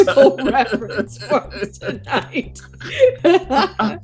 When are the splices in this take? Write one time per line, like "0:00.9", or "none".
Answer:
none